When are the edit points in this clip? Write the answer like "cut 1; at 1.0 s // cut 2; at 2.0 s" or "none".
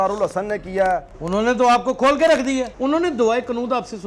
cut 1; at 1.2 s // cut 2; at 2.7 s